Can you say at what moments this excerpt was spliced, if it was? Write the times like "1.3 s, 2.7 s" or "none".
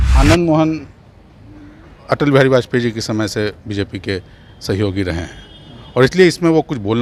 none